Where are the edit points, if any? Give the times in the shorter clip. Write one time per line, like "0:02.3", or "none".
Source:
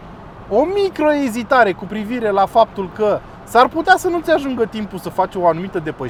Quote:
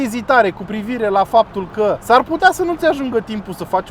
0:02.0